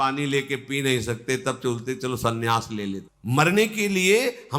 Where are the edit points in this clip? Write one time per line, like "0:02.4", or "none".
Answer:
0:03.1